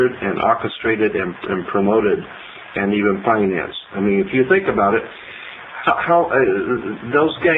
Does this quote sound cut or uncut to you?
cut